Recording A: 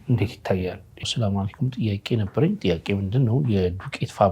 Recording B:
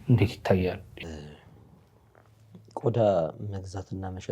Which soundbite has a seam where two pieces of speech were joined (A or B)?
A